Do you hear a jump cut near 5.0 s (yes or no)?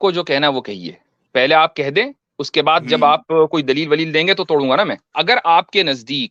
yes